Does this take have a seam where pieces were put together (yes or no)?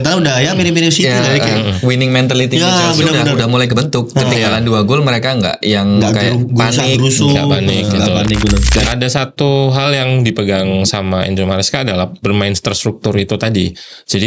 yes